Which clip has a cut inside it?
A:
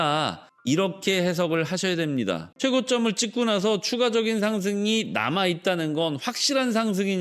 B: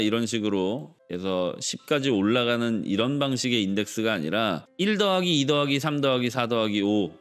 A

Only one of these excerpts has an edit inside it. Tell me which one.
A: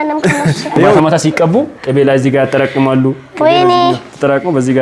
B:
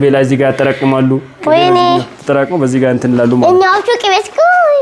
A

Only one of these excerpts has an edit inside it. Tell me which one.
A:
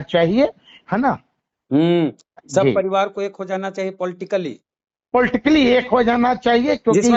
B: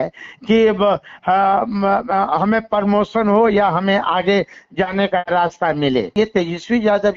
B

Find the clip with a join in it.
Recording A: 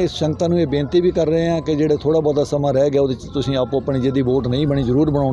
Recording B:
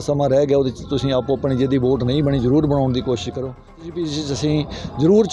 B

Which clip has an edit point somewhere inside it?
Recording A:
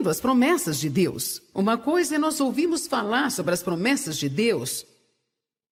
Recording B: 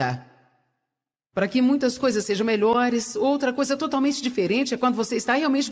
B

